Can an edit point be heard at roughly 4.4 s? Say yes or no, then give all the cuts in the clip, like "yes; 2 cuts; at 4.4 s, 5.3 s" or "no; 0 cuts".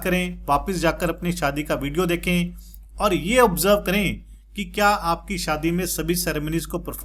no; 0 cuts